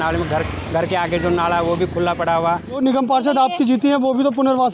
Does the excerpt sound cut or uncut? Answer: cut